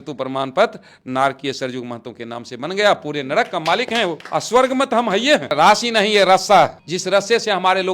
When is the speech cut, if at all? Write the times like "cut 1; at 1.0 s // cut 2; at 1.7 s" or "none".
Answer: cut 1; at 4.2 s // cut 2; at 5.5 s // cut 3; at 6.9 s